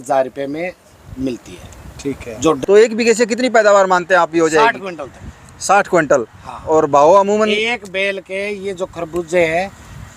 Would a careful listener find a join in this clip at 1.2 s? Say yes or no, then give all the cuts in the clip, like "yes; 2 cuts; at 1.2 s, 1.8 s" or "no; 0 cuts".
no; 1 cut; at 2.6 s